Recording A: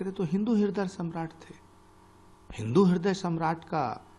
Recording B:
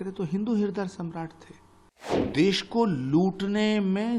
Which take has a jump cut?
B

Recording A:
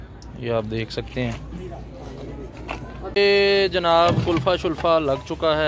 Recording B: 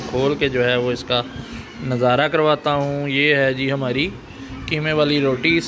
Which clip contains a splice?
A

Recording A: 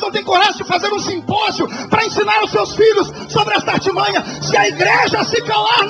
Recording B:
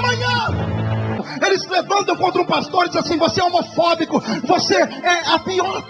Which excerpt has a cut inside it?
B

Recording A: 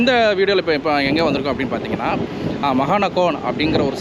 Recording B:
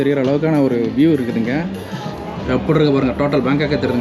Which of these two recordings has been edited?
B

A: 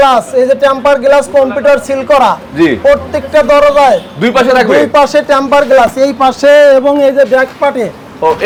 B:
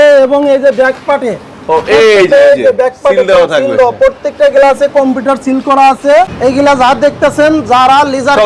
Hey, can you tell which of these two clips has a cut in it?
B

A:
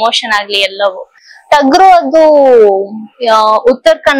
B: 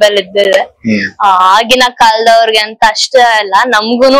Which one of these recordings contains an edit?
A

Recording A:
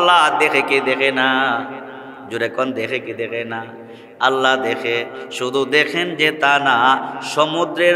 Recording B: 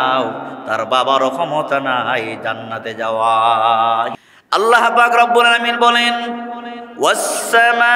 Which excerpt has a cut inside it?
B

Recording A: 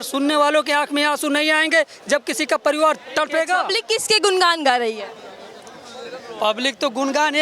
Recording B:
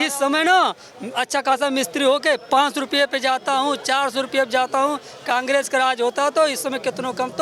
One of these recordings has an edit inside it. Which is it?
A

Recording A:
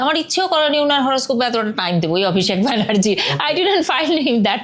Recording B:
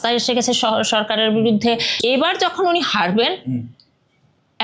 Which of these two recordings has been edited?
B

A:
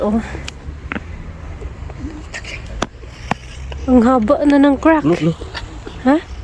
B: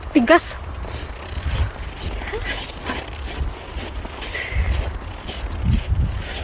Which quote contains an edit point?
B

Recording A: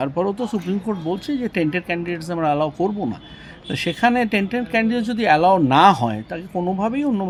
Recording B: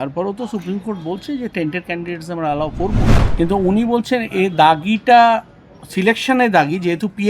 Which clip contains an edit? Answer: B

